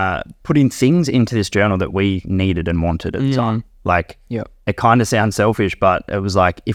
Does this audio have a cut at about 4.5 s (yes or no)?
no